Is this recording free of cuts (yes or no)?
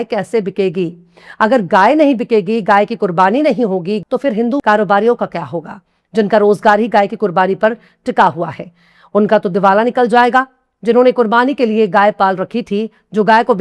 no